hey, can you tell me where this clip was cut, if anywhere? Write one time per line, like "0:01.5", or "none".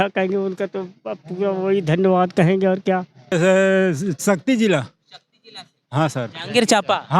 0:03.3